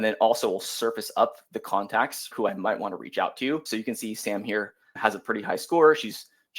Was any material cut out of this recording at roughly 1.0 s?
no; 3 cuts; at 2.3 s, 3.7 s, 4.9 s

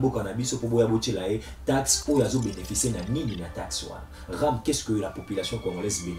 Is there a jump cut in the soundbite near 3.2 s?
no; 0 cuts

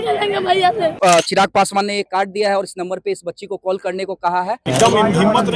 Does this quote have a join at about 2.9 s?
no; 2 cuts; at 0.9 s, 4.6 s

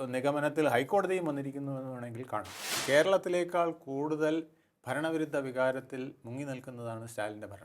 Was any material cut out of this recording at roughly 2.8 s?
yes; 1 cut; at 2.8 s

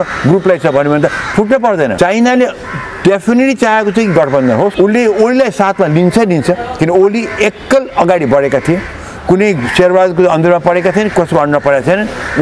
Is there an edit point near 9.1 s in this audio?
no; 2 cuts; at 1.9 s, 4.7 s

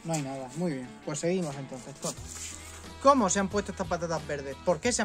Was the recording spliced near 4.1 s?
no; 1 cut; at 2.8 s

